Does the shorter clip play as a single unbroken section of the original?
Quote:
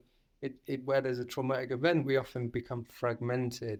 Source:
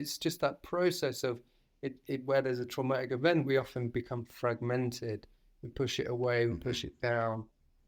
yes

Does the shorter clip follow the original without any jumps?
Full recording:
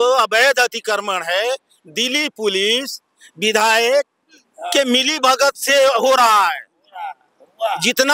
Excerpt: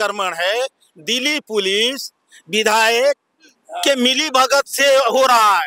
yes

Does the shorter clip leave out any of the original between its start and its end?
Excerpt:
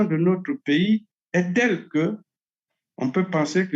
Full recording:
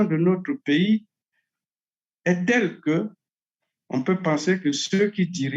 yes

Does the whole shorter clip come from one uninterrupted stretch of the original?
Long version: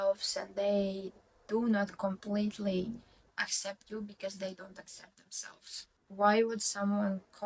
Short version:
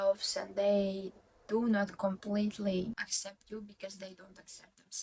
no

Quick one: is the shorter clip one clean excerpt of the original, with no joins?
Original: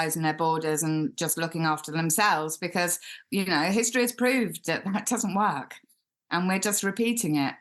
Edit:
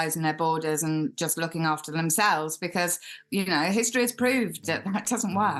yes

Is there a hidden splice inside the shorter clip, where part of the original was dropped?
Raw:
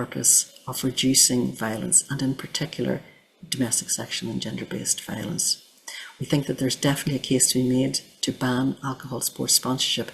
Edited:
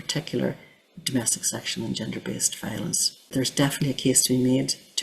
yes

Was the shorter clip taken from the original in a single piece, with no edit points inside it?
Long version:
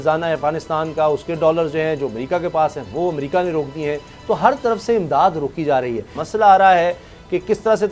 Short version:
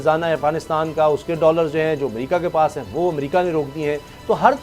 yes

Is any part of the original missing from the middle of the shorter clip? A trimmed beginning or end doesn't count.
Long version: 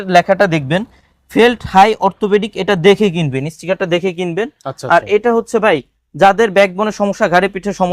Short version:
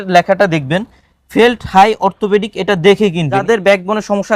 yes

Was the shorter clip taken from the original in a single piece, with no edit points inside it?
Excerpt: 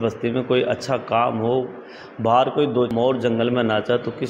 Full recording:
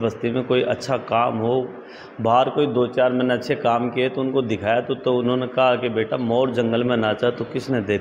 no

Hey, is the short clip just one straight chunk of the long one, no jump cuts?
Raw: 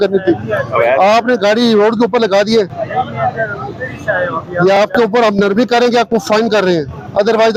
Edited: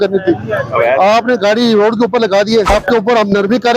no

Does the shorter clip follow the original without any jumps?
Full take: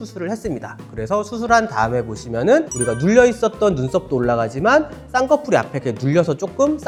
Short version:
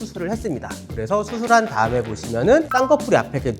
no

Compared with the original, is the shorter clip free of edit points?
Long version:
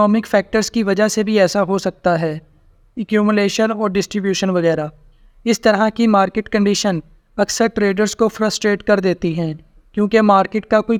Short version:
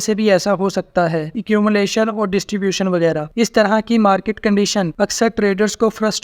no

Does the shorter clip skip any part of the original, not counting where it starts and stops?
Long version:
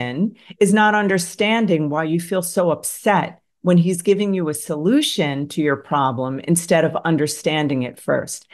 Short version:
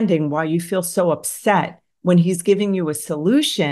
no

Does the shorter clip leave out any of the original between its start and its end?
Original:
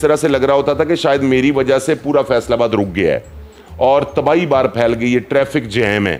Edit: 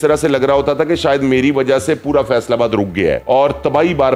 yes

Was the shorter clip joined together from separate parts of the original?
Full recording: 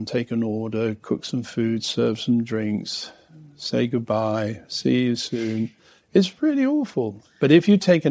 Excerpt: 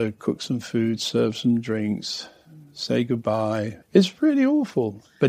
yes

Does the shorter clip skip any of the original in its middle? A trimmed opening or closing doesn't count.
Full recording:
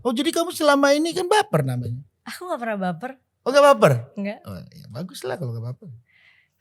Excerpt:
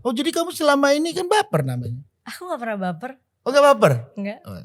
no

